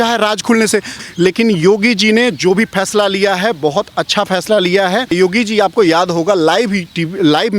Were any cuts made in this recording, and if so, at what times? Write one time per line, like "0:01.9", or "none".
0:01.0
0:05.1

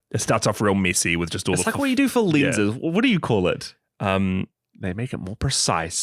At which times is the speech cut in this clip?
0:04.6

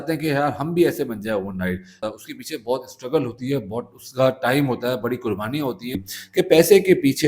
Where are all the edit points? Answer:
0:02.0
0:06.1

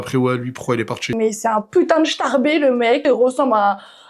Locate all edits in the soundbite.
0:01.0
0:03.0

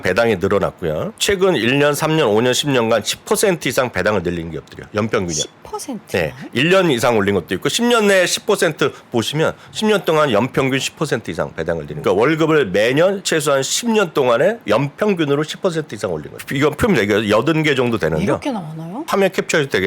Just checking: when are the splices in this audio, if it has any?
0:01.1
0:11.9
0:13.2
0:16.4
0:19.1

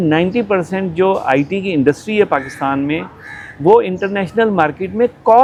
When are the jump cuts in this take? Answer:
none

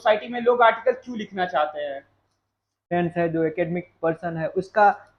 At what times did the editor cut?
0:02.9

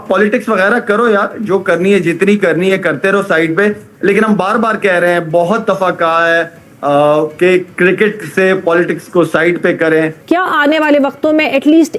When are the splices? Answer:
none

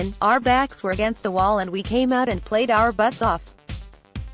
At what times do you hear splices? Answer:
none

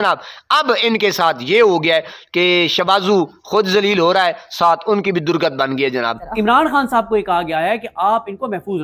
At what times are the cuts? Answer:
0:06.2

